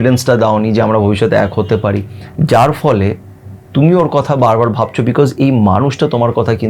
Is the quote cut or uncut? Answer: uncut